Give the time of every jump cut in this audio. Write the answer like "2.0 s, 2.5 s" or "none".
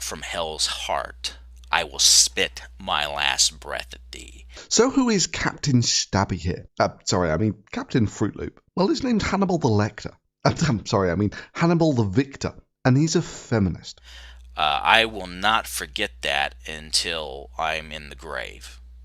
4.6 s